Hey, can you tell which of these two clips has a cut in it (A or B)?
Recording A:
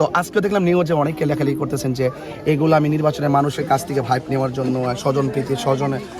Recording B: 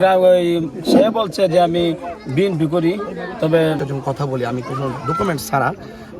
B